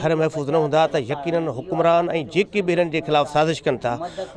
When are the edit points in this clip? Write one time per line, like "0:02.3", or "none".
none